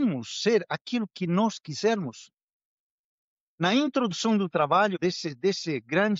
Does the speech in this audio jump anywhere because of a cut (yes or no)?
yes